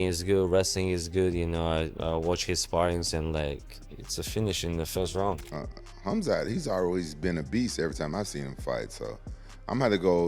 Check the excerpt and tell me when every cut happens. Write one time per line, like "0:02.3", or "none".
0:05.4